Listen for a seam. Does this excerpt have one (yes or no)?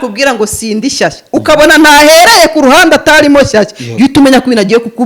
no